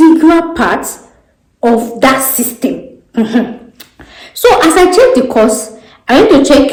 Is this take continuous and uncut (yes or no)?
yes